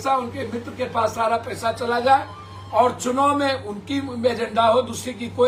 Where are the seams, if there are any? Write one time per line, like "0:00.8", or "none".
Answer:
none